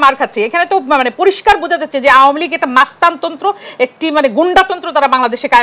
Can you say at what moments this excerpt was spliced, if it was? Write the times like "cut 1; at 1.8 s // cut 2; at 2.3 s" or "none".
none

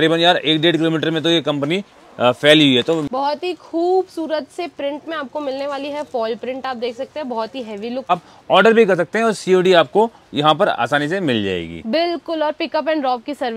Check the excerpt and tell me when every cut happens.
cut 1; at 3.1 s // cut 2; at 8.1 s

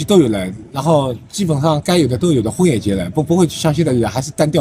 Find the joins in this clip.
none

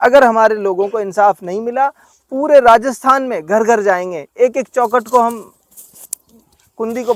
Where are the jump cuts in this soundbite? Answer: none

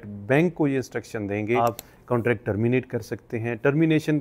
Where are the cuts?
cut 1; at 1.6 s

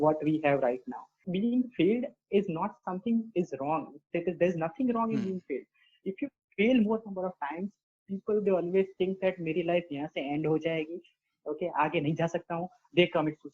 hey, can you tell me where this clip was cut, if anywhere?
cut 1; at 1.2 s

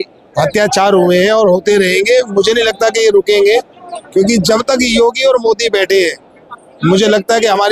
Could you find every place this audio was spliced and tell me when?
none

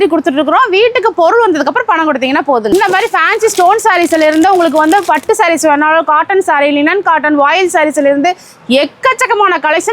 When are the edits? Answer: cut 1; at 2.7 s

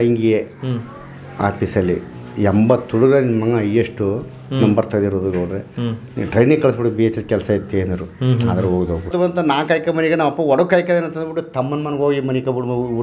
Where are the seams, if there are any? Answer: cut 1; at 9.1 s

